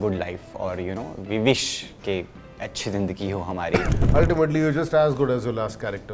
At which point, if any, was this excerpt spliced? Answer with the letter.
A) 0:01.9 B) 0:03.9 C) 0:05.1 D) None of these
B